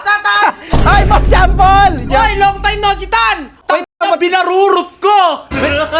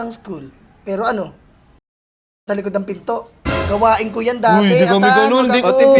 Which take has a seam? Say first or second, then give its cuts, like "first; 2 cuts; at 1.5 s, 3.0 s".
first; 1 cut; at 3.6 s